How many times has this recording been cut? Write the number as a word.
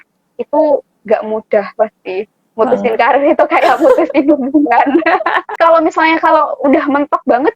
one